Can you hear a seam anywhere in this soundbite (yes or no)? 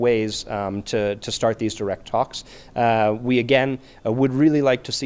no